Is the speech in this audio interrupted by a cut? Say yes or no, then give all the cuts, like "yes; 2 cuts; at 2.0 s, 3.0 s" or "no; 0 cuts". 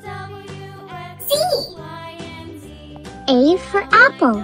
yes; 2 cuts; at 1.7 s, 3.1 s